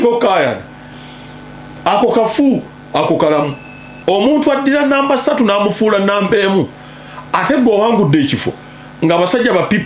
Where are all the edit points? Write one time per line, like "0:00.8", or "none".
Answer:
0:03.9

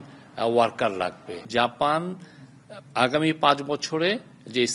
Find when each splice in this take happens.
0:01.4

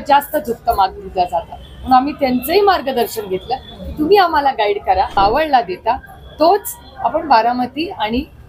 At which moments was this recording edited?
0:05.2

